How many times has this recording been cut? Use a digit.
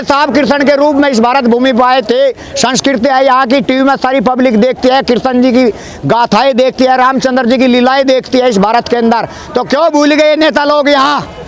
0